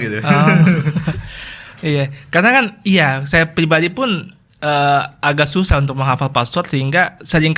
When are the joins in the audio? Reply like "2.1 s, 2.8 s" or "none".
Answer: none